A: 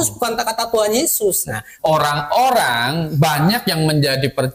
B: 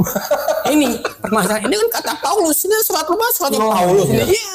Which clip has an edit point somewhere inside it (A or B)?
A